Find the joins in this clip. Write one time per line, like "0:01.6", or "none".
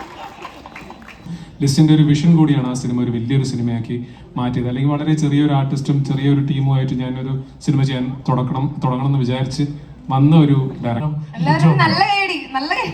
0:01.4
0:11.0

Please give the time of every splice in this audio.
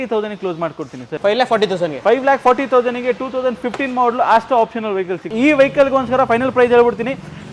0:01.0
0:05.3

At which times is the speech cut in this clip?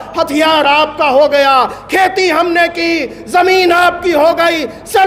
none

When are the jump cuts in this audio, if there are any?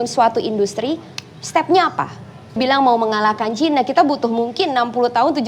0:02.6

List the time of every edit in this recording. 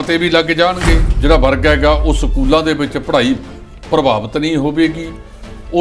0:01.1

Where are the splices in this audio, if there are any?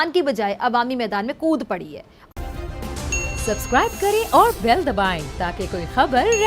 0:02.2

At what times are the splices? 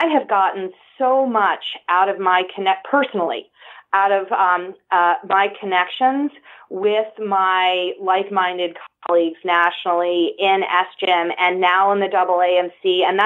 none

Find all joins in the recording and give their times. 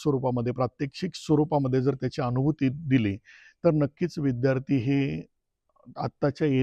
none

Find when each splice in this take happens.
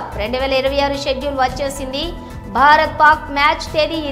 none

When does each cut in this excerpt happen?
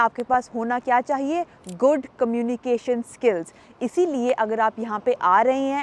none

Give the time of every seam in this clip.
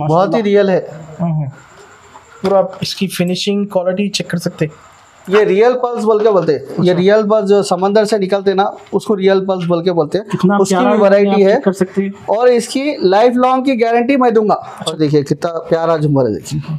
0:05.3
0:14.8

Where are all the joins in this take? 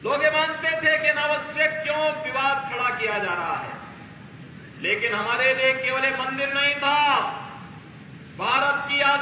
none

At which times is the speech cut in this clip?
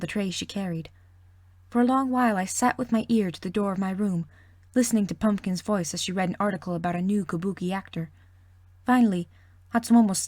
0:02.8

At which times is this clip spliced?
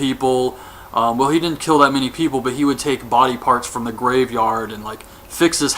0:04.1

